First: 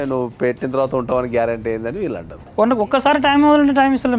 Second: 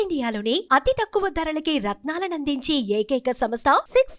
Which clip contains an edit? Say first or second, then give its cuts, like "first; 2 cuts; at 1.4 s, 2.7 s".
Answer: first; 1 cut; at 2.5 s